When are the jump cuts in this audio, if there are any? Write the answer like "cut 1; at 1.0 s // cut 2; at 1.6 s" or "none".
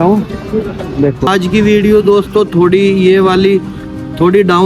cut 1; at 1.3 s